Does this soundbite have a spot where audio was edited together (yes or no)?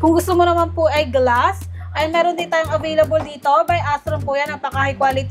no